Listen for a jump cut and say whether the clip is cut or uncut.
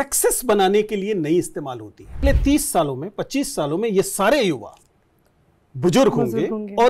cut